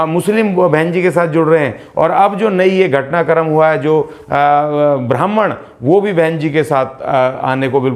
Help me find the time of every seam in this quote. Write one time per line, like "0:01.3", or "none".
none

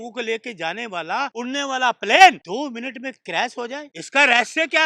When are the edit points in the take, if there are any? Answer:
0:01.3
0:02.4
0:04.0

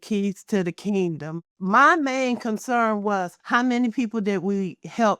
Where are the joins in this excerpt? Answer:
0:01.5
0:03.4

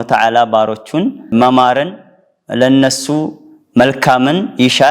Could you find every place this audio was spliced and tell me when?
0:01.3

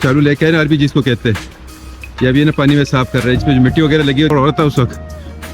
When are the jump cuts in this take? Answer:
0:04.3

